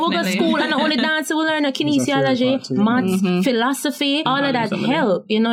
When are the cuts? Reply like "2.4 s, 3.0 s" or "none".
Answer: none